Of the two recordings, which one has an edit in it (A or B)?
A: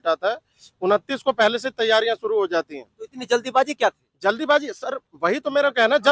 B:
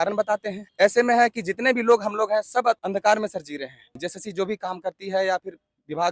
B